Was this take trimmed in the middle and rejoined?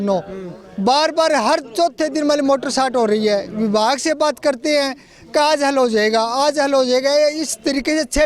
no; 0 cuts

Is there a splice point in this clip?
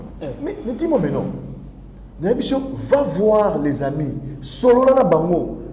no; 0 cuts

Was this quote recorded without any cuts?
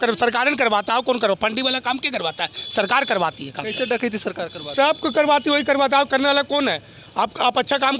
yes; 0 cuts

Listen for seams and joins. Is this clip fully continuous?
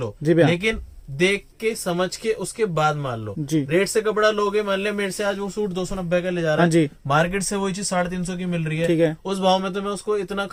yes; 0 cuts

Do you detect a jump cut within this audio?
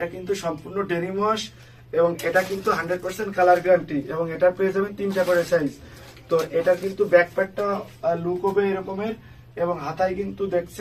no; 0 cuts

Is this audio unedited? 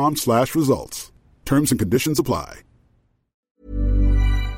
no; 1 cut; at 3.5 s

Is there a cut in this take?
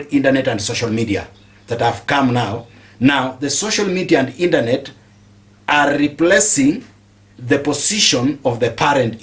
no; 0 cuts

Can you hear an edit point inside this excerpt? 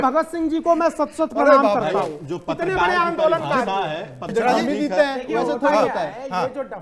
yes; 1 cut; at 4.3 s

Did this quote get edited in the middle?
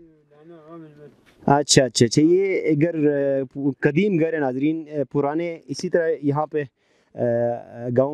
no; 0 cuts

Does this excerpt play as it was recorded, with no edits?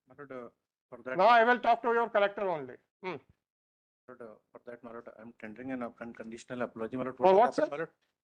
yes; 0 cuts

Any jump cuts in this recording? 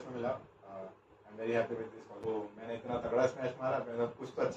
yes; 1 cut; at 2.2 s

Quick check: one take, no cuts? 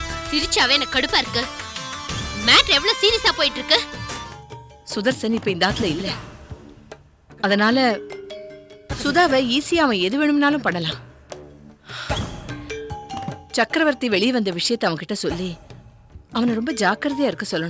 no; 1 cut; at 4.4 s

